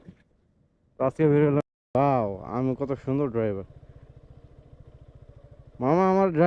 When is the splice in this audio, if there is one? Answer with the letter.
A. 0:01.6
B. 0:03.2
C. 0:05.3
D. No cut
A